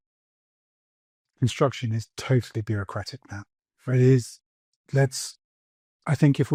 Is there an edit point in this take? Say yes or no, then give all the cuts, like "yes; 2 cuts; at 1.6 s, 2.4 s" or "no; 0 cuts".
no; 0 cuts